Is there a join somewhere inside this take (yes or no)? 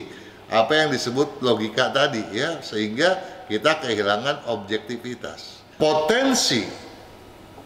yes